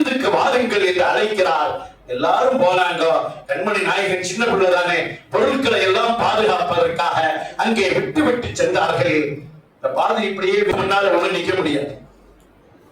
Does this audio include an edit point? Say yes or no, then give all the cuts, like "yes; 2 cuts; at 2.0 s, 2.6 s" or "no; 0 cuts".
yes; 1 cut; at 10.7 s